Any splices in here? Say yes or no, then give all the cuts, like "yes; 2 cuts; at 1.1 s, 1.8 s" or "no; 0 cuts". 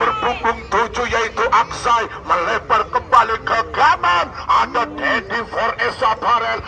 no; 0 cuts